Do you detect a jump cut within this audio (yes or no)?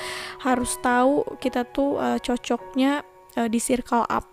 no